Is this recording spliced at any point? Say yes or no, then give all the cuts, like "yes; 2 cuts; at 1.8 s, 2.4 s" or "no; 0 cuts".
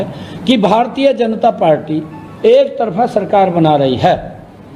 no; 0 cuts